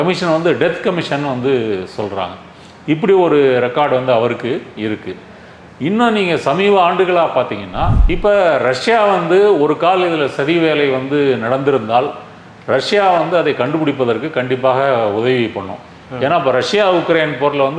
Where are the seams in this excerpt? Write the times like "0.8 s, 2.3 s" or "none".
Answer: 8.0 s